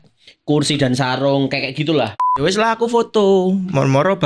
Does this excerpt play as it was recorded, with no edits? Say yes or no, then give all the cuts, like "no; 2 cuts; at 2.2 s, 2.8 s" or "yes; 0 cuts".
no; 1 cut; at 2.3 s